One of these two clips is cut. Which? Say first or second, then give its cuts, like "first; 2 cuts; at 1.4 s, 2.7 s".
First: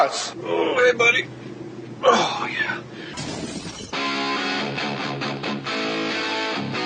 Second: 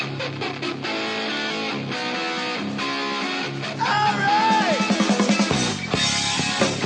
first; 1 cut; at 1.7 s